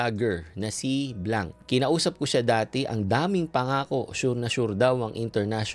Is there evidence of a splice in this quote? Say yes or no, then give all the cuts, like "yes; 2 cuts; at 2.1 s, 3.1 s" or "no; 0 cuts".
yes; 1 cut; at 1.6 s